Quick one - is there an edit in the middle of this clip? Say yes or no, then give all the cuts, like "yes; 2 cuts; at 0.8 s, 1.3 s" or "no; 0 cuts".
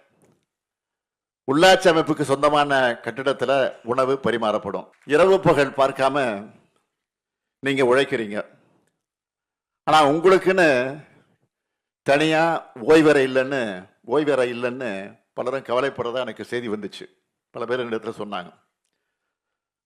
yes; 1 cut; at 4.9 s